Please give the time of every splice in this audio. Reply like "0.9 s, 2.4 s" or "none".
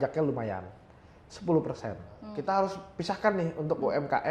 2.3 s